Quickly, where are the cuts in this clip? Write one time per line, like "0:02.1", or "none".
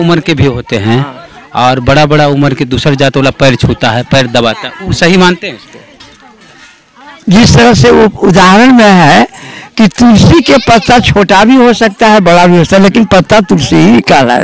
none